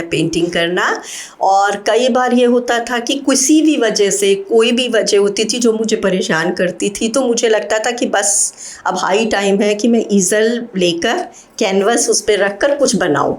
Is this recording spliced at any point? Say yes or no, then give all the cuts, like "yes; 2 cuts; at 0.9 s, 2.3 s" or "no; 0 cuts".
no; 0 cuts